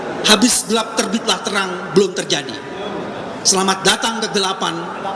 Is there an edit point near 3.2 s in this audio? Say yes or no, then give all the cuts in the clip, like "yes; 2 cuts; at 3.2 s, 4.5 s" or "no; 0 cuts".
no; 0 cuts